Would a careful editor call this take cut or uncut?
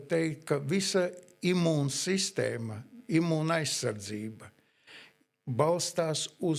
uncut